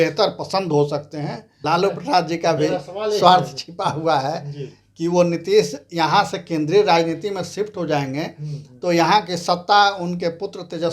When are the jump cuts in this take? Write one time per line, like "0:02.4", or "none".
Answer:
0:01.5

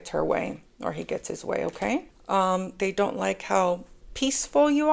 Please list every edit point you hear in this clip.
0:02.1

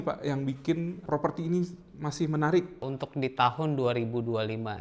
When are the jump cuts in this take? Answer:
0:01.0
0:02.8

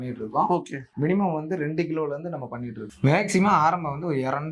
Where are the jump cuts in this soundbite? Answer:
0:02.8

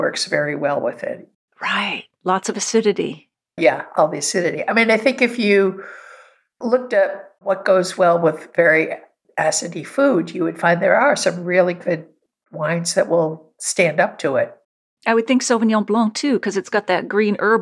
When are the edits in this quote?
none

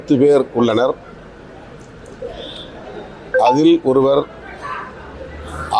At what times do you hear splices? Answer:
none

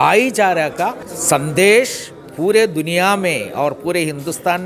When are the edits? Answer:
0:01.1

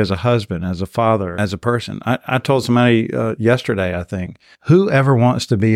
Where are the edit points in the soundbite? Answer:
0:01.4

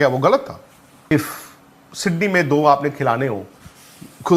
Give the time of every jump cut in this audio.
0:01.1

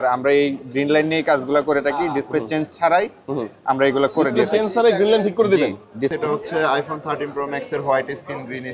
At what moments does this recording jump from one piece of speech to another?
0:06.1

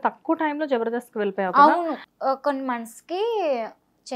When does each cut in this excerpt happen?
0:02.1

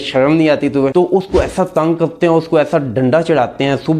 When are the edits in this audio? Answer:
0:00.9

